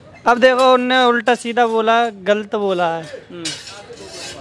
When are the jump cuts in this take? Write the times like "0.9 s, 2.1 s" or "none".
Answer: none